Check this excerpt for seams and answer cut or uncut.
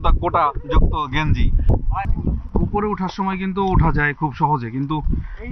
uncut